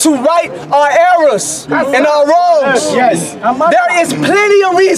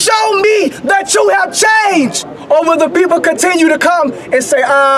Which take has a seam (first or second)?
second